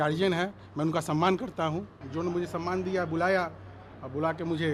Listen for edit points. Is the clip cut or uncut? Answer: cut